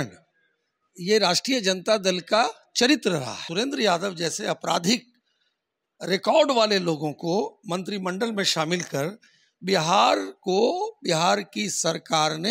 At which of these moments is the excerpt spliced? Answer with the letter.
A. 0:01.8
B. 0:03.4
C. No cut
B